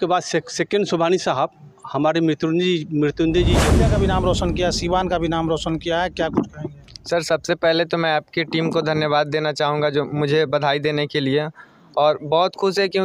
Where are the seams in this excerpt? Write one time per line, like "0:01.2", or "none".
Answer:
0:03.8